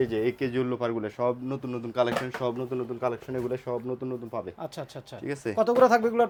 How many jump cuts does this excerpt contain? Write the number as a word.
zero